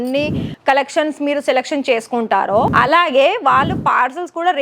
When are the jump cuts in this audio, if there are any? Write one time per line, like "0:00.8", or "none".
0:02.7

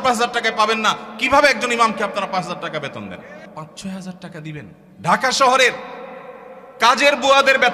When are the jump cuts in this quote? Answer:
0:03.4
0:04.8

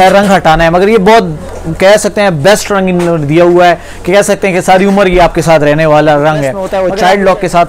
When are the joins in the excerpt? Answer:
0:06.6

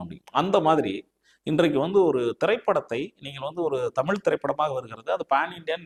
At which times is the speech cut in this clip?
none

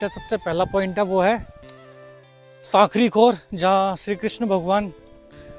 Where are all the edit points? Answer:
none

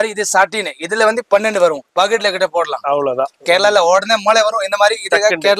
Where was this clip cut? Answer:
0:01.8

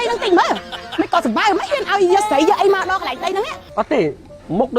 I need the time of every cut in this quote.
0:03.6

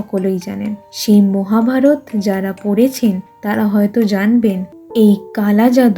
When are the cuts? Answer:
0:04.7

